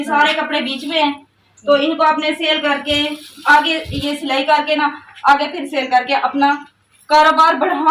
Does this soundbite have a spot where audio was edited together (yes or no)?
no